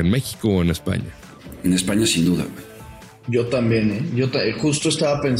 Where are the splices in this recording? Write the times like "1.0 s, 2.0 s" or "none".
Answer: none